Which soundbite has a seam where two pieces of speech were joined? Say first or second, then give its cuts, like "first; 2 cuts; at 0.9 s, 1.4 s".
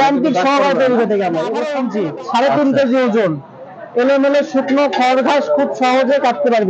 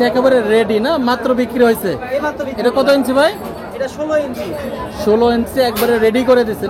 first; 1 cut; at 1.7 s